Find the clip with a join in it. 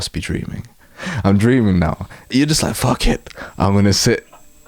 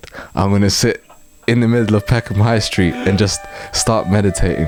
first; 2 cuts; at 1.0 s, 2.3 s

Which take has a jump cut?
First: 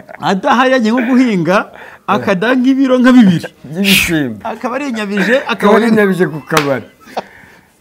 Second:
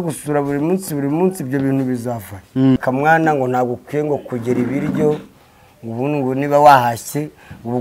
second; 1 cut; at 2.8 s

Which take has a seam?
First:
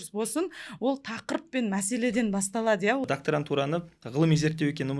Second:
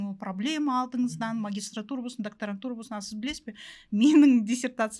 first; 1 cut; at 3.0 s

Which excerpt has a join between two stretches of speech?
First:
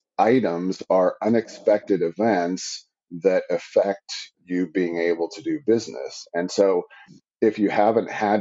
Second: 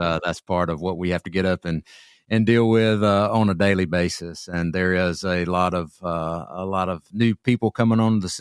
second; 1 cut; at 7.1 s

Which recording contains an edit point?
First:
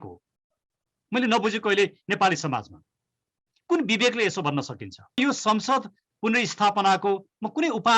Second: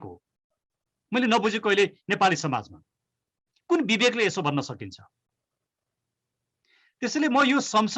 first; 1 cut; at 5.2 s

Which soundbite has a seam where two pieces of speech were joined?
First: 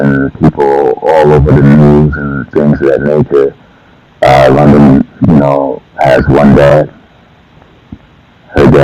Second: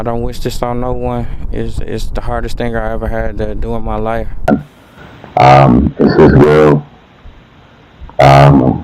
second; 1 cut; at 4.5 s

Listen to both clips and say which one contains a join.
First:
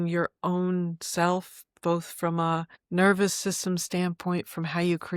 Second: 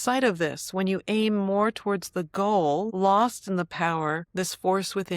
second; 1 cut; at 4.2 s

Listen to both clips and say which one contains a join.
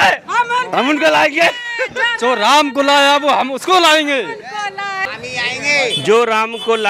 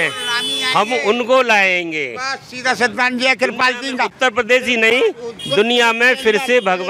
first; 1 cut; at 5.1 s

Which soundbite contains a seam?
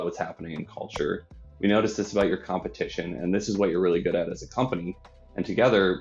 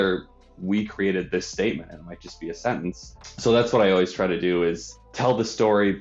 second; 1 cut; at 3.1 s

